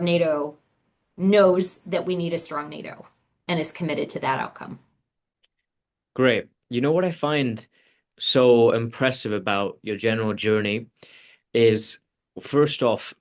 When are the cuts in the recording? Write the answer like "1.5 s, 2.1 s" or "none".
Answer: none

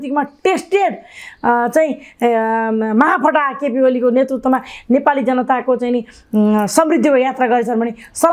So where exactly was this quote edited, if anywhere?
none

